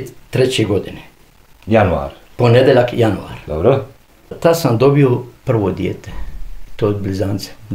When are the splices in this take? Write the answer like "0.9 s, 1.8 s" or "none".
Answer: 4.3 s